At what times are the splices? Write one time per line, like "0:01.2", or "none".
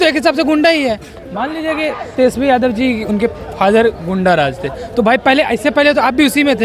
none